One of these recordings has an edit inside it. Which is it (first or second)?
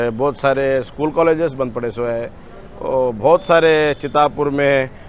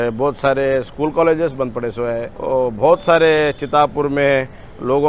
second